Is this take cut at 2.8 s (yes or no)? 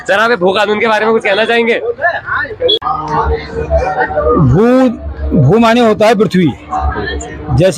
yes